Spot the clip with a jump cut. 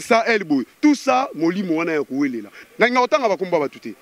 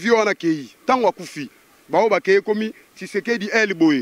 first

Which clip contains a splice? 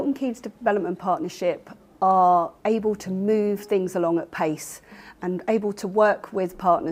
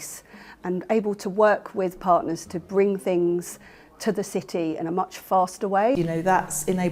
second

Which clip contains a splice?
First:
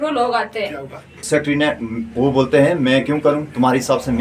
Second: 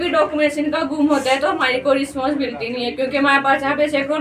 first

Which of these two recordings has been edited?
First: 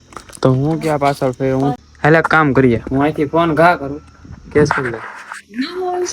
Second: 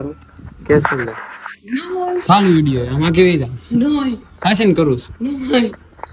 first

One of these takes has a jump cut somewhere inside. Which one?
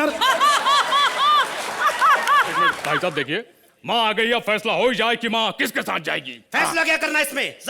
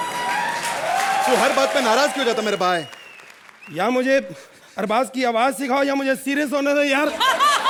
first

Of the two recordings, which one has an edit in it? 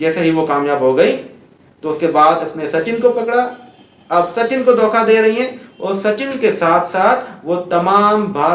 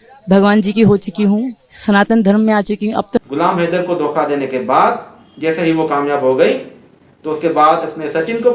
second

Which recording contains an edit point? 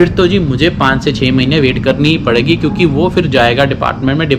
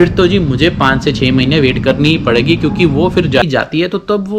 second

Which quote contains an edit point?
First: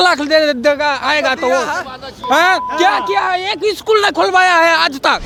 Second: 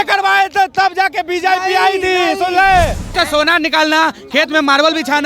second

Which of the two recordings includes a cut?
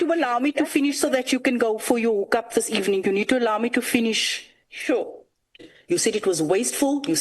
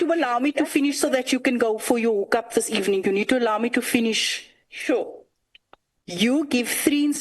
first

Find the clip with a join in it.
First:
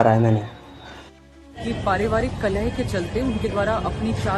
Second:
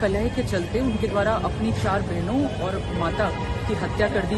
first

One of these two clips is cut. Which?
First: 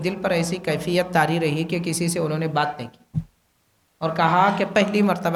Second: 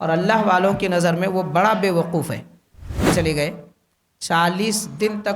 second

